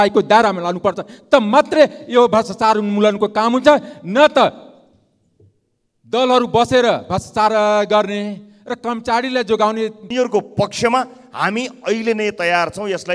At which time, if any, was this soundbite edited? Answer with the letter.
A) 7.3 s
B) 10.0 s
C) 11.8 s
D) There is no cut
B